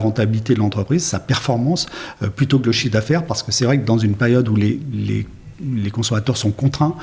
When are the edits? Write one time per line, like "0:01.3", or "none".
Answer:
none